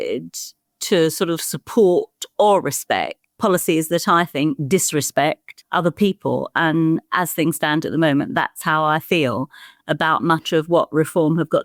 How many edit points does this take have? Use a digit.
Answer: 0